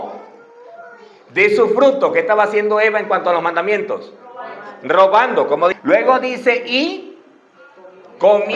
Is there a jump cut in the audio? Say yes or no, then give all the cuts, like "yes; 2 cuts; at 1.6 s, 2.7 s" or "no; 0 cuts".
yes; 1 cut; at 5.8 s